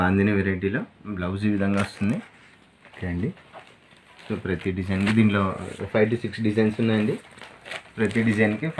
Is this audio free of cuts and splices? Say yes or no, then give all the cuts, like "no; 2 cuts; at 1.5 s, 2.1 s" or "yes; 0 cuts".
yes; 0 cuts